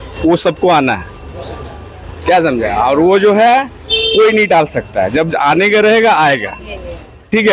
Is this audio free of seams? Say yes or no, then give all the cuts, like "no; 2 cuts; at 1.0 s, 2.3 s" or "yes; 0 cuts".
yes; 0 cuts